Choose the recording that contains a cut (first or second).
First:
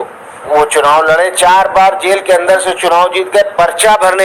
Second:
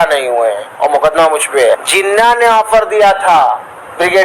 second